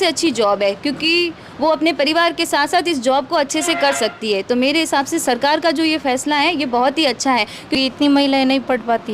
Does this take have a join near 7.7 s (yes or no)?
yes